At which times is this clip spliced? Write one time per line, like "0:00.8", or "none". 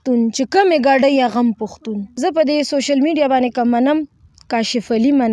0:02.1